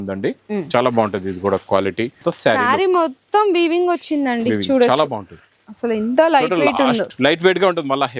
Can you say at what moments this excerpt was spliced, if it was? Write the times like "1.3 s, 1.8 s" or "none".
2.2 s